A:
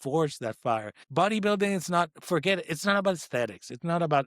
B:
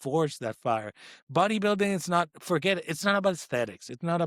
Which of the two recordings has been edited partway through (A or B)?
A